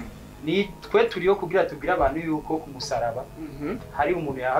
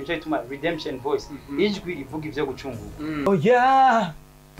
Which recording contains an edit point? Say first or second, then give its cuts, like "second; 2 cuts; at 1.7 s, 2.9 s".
second; 1 cut; at 3.3 s